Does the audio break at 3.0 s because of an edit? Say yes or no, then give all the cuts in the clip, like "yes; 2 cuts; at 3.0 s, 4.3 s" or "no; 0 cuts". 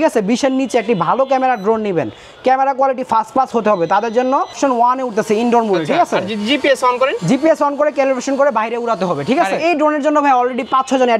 no; 2 cuts; at 4.6 s, 9.6 s